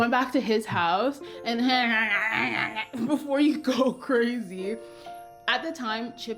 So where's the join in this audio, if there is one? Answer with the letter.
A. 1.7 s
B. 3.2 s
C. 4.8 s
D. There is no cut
D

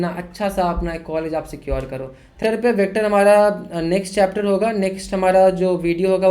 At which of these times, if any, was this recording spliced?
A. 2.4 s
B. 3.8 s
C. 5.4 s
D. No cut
A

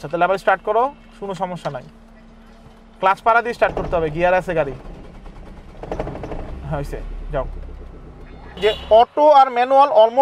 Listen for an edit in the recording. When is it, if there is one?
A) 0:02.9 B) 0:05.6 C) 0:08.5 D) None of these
C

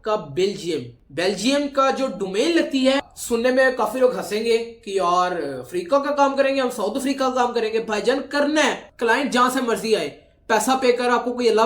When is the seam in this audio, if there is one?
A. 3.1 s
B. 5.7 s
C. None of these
A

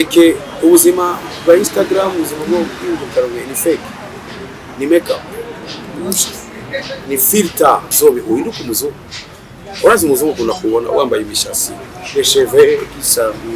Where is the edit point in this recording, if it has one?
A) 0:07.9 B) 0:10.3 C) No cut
A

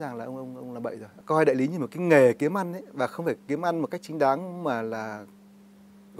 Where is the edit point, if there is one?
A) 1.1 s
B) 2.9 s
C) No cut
A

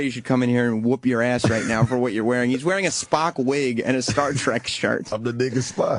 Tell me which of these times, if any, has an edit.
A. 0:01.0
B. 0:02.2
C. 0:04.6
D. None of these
B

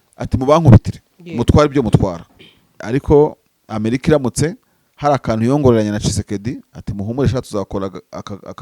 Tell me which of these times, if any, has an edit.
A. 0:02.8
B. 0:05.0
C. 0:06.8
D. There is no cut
A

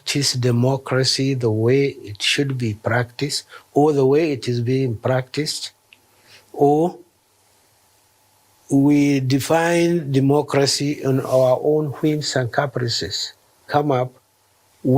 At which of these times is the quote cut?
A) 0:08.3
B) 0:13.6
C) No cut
B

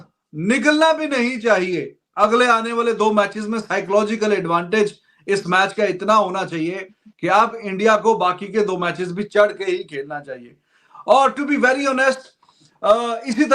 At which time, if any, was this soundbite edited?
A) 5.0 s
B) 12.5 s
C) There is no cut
C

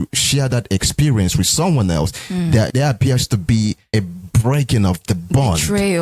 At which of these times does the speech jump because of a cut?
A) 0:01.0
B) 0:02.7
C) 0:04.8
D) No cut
B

